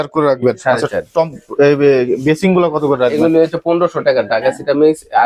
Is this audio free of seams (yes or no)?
yes